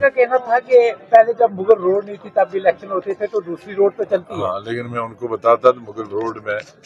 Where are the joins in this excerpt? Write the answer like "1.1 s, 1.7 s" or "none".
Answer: none